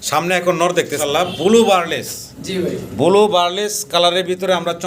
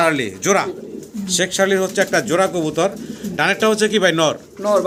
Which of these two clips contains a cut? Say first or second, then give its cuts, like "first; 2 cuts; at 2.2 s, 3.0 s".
first; 1 cut; at 0.9 s